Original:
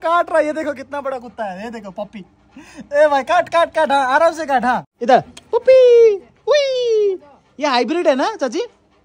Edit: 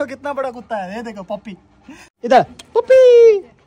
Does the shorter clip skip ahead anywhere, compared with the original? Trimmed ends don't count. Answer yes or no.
yes